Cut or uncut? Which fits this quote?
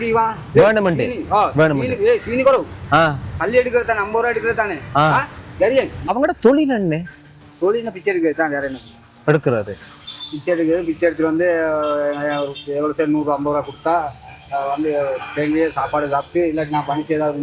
cut